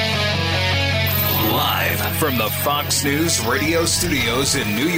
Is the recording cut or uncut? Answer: cut